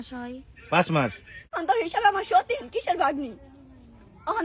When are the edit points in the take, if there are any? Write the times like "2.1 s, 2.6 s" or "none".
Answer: 1.6 s